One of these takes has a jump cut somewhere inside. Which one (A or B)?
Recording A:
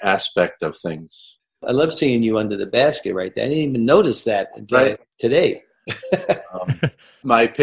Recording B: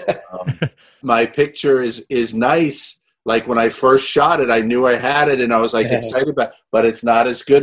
A